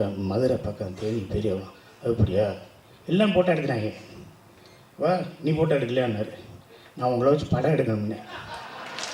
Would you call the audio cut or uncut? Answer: uncut